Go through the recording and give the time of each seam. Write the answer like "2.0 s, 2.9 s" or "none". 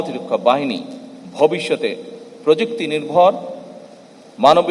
none